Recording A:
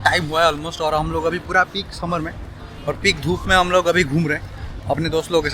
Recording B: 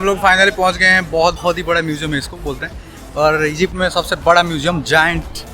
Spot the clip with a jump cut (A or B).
B